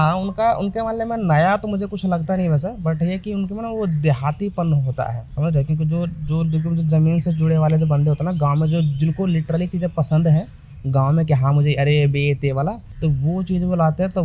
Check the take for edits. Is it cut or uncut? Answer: uncut